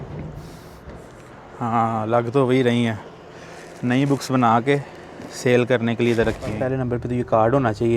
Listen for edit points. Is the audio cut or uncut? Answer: cut